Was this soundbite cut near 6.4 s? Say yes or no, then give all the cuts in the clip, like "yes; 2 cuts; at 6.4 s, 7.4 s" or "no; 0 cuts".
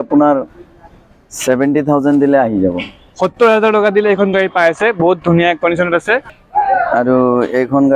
yes; 1 cut; at 6.4 s